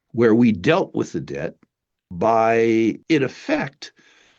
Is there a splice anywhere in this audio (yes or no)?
yes